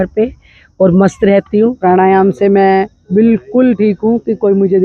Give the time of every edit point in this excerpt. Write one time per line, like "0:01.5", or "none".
0:01.8